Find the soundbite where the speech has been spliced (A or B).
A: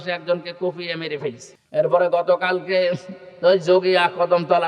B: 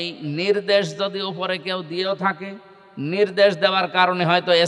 A